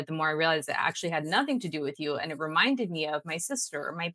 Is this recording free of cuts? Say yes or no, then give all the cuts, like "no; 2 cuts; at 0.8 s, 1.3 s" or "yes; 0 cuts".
yes; 0 cuts